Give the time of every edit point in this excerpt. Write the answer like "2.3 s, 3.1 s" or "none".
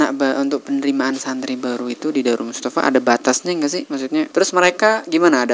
4.3 s